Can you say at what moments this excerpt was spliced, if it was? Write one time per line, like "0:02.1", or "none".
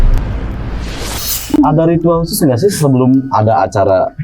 none